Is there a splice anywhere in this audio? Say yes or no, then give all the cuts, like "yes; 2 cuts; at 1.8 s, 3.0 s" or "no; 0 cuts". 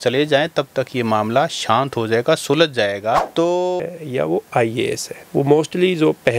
yes; 1 cut; at 3.8 s